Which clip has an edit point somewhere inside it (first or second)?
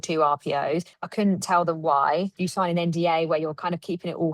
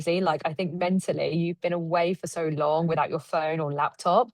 first